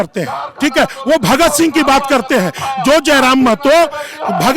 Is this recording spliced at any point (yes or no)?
no